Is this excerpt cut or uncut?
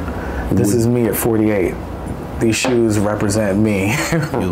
uncut